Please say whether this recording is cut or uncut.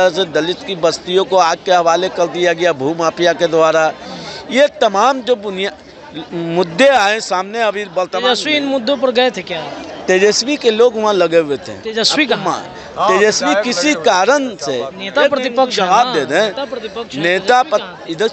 uncut